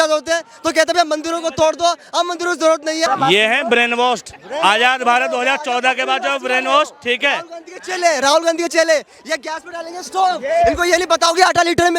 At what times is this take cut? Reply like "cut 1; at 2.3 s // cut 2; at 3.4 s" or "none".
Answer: cut 1; at 3.1 s